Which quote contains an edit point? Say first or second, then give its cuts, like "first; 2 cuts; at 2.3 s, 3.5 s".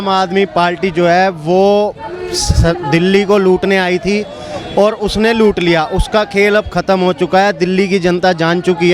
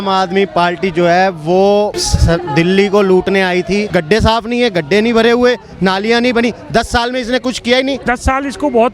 second; 3 cuts; at 2.1 s, 3.9 s, 8.0 s